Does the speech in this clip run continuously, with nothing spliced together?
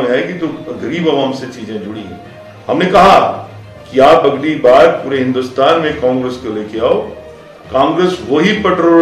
yes; 0 cuts

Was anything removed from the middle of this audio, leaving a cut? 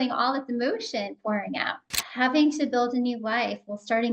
yes; 1 cut; at 1.7 s

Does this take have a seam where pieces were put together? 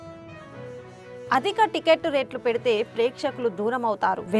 yes; 1 cut; at 1.2 s

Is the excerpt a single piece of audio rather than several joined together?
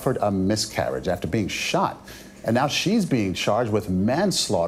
yes; 0 cuts

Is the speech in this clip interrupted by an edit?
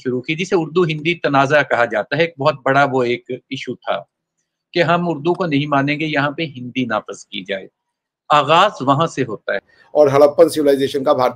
yes; 1 cut; at 9.7 s

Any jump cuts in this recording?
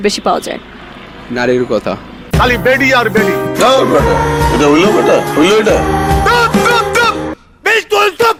no; 0 cuts

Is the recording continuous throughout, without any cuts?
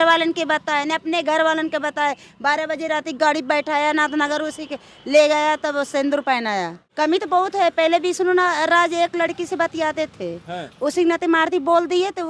no; 1 cut; at 6.8 s

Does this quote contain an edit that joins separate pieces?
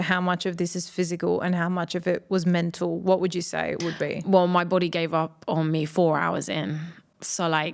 no; 0 cuts

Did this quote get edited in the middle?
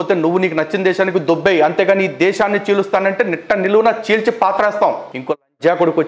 yes; 1 cut; at 5.1 s

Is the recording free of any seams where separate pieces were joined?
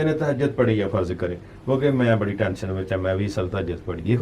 yes; 0 cuts

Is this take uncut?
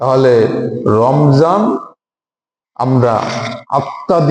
yes; 0 cuts

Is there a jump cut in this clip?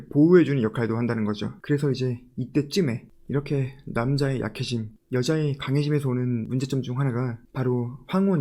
yes; 2 cuts; at 1.5 s, 6.5 s

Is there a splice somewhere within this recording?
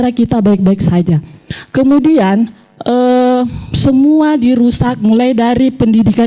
no; 0 cuts

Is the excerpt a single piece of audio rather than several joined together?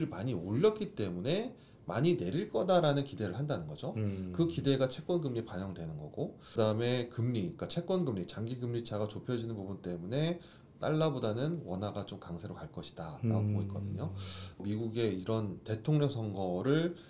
no; 2 cuts; at 6.4 s, 14.6 s

